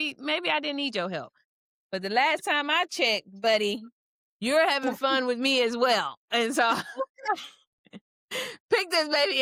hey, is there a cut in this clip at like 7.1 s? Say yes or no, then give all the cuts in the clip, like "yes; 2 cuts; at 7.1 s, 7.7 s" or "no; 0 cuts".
no; 0 cuts